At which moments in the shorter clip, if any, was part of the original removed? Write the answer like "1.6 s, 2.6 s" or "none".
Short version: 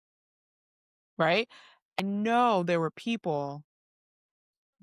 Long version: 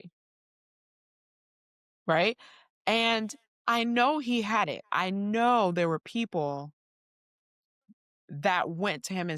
2.0 s